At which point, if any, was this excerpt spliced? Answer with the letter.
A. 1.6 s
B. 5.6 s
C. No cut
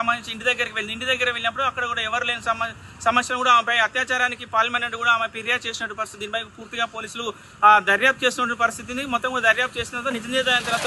C